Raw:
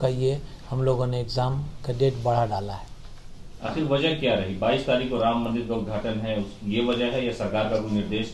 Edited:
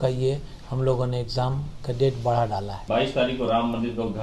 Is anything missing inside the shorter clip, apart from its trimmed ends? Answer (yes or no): yes